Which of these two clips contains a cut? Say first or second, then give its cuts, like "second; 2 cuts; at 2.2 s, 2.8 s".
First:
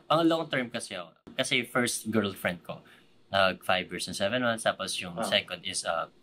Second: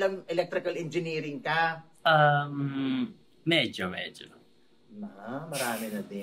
first; 1 cut; at 1.2 s